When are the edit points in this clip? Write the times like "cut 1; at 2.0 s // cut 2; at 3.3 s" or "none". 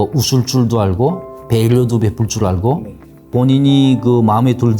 cut 1; at 1.3 s // cut 2; at 3.3 s